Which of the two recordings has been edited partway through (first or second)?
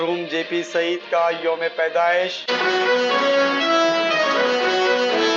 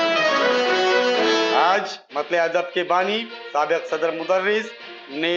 second